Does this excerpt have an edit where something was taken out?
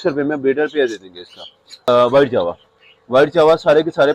yes; 1 cut; at 1.9 s

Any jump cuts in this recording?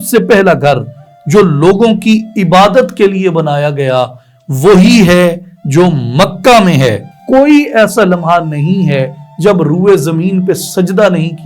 yes; 1 cut; at 7.2 s

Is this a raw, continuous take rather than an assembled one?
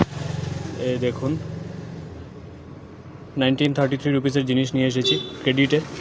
yes; 0 cuts

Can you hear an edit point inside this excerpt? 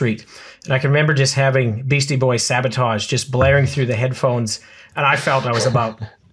no; 0 cuts

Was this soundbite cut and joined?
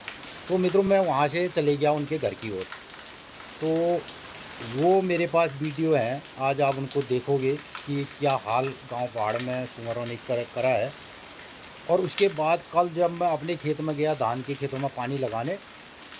no; 0 cuts

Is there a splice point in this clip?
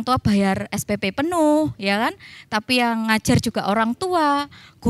no; 0 cuts

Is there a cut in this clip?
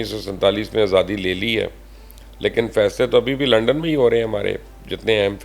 no; 0 cuts

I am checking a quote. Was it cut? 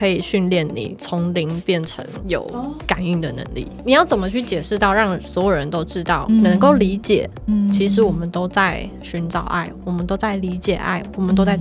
yes; 3 cuts; at 0.9 s, 2.4 s, 3.7 s

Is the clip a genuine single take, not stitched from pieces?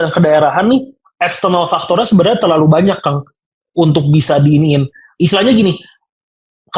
yes; 0 cuts

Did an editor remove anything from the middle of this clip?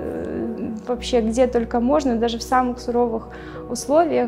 no; 0 cuts

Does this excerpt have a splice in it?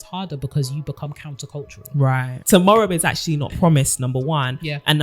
yes; 1 cut; at 2.3 s

